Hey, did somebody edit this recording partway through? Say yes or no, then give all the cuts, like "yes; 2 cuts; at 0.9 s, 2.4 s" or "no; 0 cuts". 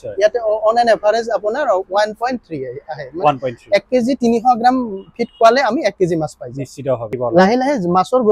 yes; 1 cut; at 7.1 s